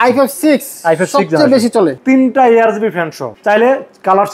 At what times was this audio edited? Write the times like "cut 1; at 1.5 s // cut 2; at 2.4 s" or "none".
cut 1; at 2.0 s // cut 2; at 3.3 s